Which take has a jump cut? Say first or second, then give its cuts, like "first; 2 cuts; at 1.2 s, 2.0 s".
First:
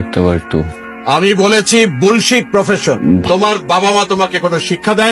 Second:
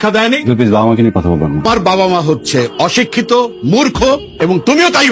first; 1 cut; at 3.2 s